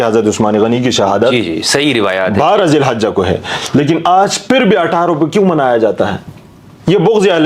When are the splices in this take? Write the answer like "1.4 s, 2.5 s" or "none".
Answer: none